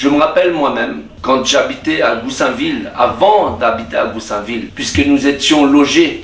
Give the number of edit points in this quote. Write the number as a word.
two